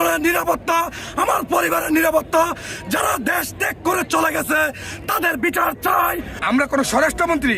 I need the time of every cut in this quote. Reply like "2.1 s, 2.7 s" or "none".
6.3 s